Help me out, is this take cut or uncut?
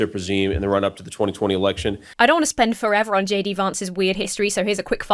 uncut